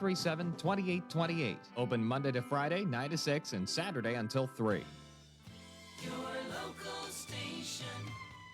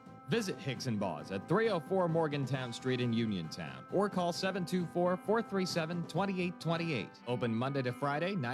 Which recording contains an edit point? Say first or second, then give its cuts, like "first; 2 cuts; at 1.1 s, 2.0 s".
first; 1 cut; at 5.0 s